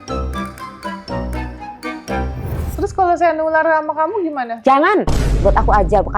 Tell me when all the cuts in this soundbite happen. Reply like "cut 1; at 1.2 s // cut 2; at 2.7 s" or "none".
cut 1; at 2.7 s